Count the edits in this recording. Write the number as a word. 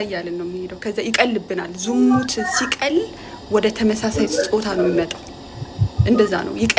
zero